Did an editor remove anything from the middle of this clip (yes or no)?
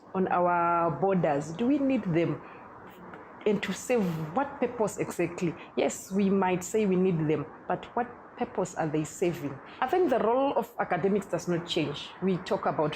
yes